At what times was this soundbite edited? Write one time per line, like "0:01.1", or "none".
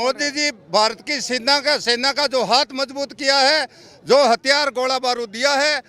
none